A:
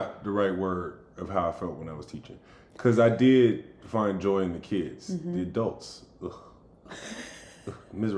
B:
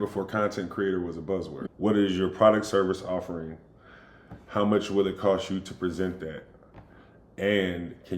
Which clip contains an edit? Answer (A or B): B